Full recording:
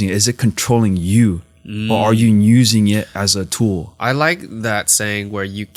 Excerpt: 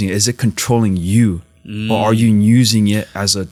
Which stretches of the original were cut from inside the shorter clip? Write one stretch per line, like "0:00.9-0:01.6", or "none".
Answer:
none